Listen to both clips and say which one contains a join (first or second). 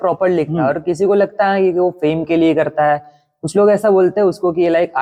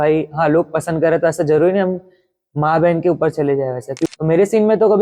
second